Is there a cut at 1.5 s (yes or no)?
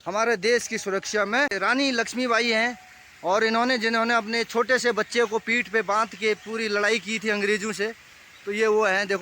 yes